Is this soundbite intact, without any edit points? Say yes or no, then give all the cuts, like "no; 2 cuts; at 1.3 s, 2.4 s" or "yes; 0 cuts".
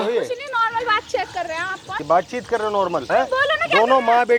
no; 2 cuts; at 1.9 s, 3.1 s